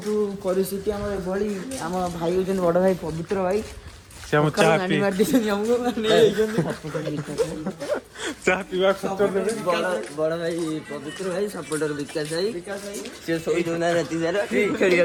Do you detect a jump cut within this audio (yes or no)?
no